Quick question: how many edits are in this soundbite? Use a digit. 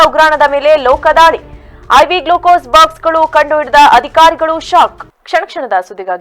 0